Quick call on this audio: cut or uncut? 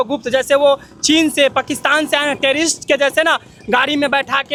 uncut